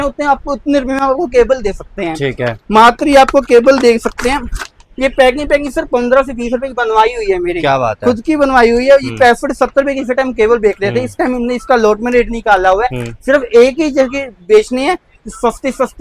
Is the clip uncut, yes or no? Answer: yes